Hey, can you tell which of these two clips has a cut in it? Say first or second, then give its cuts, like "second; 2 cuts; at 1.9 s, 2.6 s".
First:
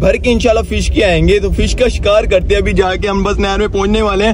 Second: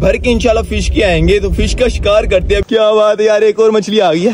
second; 1 cut; at 2.7 s